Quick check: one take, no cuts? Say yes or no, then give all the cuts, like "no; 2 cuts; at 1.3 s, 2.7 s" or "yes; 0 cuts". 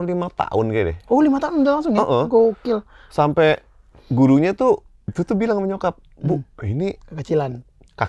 no; 1 cut; at 5.1 s